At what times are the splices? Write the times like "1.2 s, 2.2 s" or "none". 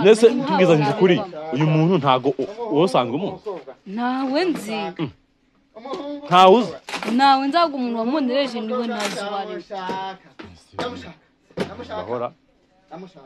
none